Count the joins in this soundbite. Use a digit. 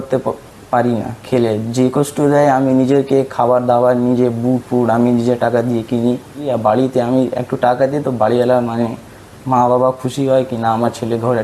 1